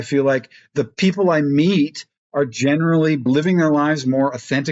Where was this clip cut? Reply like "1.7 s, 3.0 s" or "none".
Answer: 3.2 s